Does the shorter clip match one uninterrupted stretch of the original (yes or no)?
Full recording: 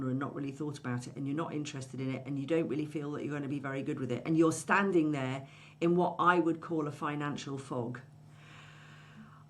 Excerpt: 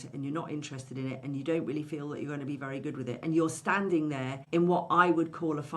no